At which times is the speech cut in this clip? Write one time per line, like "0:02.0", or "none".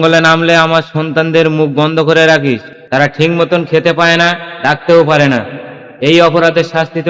none